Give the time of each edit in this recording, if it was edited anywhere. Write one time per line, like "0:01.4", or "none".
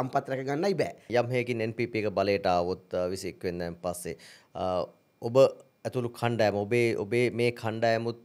0:01.1

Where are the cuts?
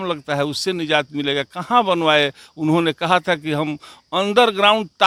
none

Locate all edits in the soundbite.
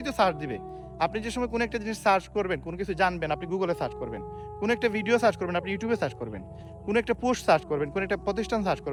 none

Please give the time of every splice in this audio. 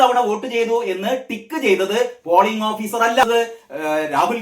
0:03.2

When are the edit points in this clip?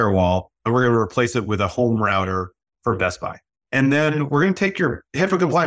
0:03.5

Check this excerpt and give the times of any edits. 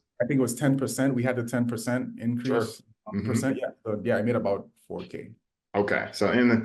none

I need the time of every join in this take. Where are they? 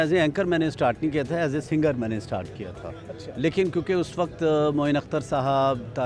none

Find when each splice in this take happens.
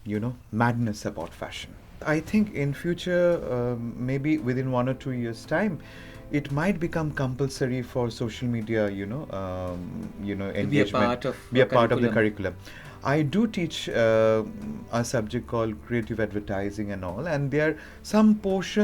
0:02.0

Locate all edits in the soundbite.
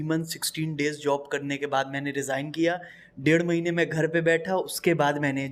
none

